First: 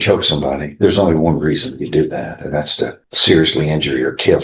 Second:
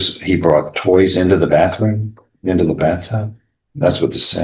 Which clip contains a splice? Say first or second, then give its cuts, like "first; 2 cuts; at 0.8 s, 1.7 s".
first; 1 cut; at 3.1 s